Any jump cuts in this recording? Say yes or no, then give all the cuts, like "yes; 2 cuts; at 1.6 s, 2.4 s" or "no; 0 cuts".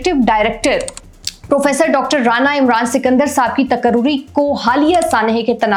no; 0 cuts